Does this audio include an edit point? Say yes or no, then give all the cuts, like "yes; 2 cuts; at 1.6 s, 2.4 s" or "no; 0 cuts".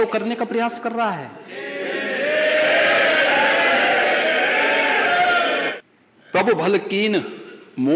yes; 1 cut; at 5.8 s